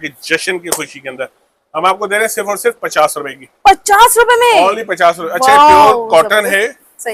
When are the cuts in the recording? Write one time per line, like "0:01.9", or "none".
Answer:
none